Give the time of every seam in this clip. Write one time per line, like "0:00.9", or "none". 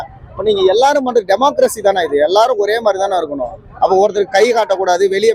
none